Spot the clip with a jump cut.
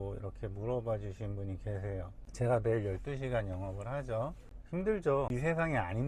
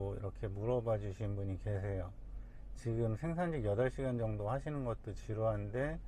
first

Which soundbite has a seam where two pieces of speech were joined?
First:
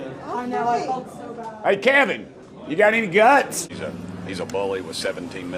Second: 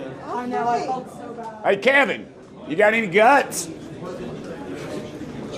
first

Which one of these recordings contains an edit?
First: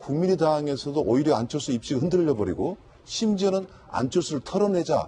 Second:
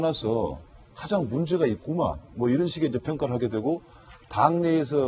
first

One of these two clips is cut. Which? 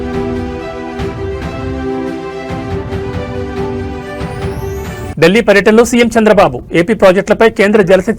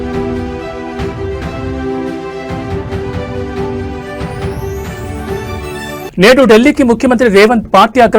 first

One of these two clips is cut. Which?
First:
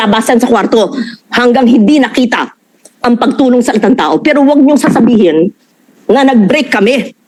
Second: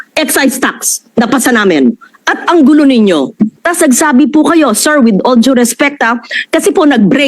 second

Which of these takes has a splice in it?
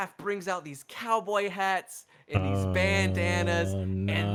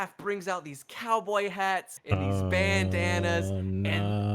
second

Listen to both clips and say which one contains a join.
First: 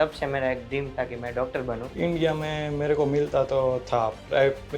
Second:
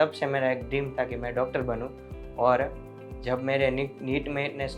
first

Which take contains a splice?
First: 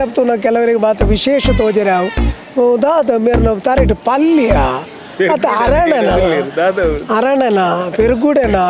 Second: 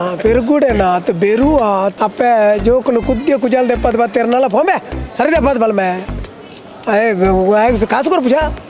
second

